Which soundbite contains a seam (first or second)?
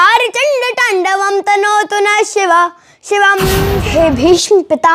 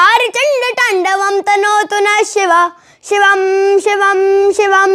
first